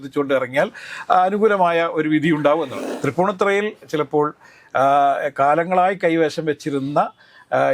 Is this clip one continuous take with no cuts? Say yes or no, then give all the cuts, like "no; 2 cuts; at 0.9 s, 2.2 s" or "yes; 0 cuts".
no; 1 cut; at 2.8 s